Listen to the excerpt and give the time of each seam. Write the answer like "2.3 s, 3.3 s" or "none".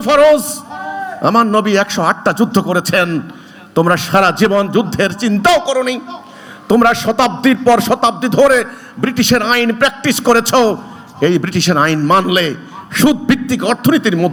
none